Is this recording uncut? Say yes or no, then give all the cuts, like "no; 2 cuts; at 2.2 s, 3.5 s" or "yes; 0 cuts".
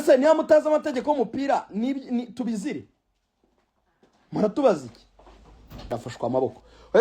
no; 1 cut; at 5.9 s